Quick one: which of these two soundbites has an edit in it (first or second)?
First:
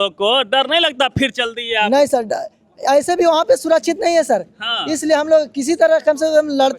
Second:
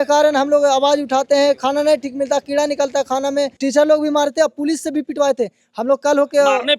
second